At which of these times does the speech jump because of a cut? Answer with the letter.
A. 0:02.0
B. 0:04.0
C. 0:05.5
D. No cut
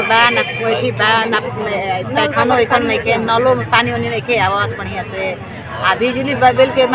D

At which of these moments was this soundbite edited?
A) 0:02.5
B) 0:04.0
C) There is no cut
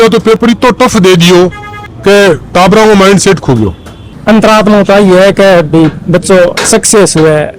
B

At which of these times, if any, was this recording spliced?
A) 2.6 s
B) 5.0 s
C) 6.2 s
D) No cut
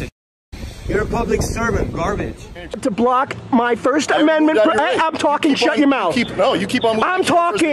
A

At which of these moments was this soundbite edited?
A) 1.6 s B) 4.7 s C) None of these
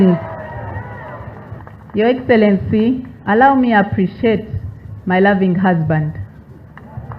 A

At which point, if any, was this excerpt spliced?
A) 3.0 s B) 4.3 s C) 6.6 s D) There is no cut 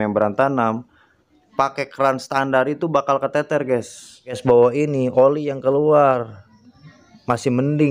B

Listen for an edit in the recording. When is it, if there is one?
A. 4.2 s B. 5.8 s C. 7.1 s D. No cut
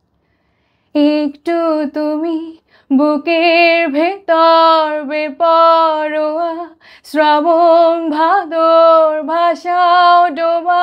D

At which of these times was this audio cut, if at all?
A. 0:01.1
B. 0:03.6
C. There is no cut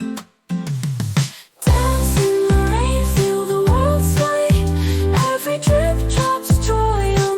A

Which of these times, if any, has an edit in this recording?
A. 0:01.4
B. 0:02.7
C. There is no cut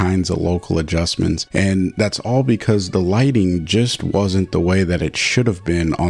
A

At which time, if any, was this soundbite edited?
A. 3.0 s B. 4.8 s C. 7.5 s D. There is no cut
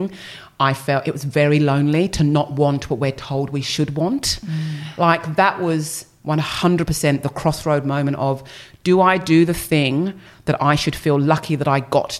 B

